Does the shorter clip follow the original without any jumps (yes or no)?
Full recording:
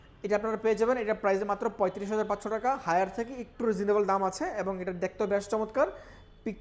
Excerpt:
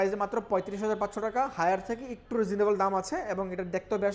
yes